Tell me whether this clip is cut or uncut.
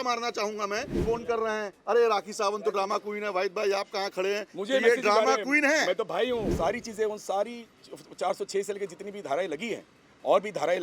cut